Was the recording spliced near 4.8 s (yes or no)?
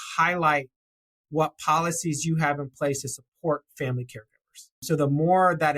yes